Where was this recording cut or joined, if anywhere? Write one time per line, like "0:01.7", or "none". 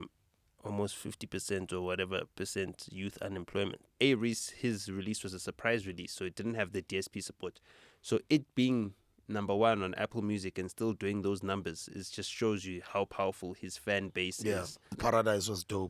0:03.9
0:15.0